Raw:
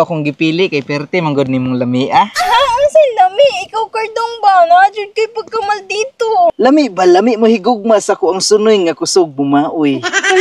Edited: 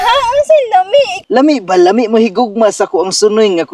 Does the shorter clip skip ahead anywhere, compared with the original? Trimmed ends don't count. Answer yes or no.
yes